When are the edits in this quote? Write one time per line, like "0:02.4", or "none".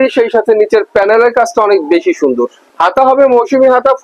0:02.6